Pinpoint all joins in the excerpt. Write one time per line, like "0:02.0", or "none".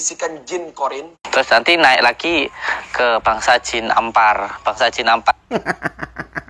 0:01.2